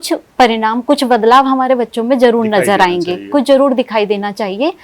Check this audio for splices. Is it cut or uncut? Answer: uncut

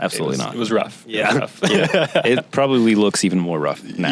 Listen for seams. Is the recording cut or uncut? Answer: uncut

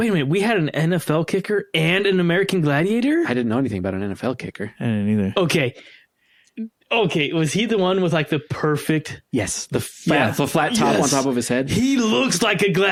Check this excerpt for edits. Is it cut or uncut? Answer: uncut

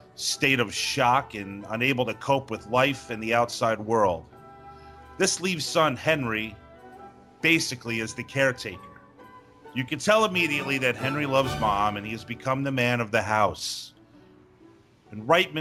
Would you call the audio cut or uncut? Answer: uncut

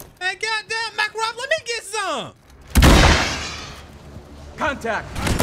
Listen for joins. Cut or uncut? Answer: uncut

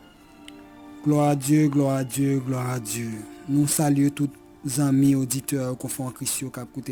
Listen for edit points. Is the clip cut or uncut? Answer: uncut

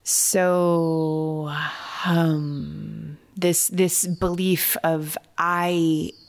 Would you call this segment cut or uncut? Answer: uncut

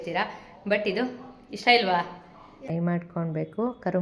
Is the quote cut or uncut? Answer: cut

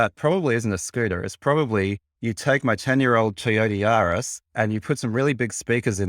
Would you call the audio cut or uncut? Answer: cut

